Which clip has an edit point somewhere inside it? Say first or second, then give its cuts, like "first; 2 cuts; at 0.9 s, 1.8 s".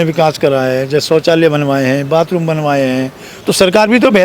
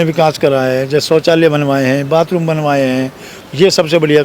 first; 1 cut; at 3.3 s